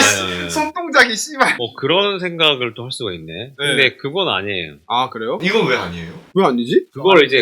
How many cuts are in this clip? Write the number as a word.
one